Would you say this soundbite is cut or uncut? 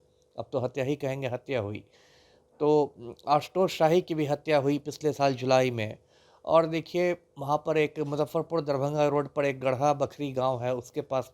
uncut